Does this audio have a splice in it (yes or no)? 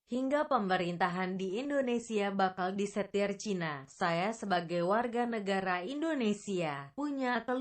yes